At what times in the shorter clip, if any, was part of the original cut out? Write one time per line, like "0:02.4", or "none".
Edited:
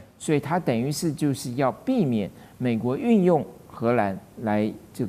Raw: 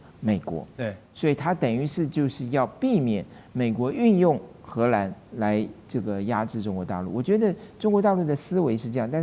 none